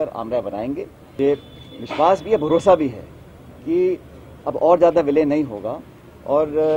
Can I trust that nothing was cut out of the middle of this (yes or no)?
no